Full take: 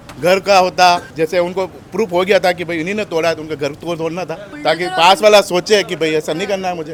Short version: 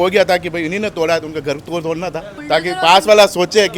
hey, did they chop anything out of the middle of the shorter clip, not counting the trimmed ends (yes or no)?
no